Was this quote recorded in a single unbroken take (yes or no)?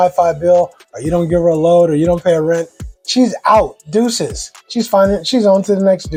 yes